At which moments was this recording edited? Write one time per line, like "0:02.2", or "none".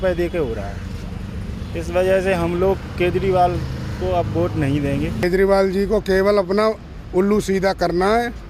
0:05.2